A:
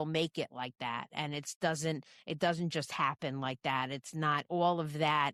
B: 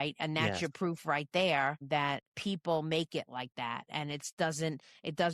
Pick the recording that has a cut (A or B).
B